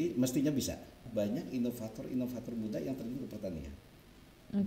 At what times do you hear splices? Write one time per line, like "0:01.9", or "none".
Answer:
0:01.0